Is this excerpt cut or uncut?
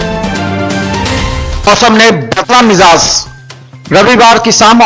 cut